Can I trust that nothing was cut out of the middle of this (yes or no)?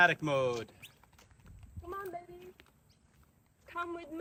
yes